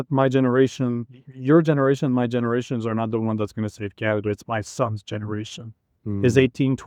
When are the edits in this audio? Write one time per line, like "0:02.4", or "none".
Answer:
none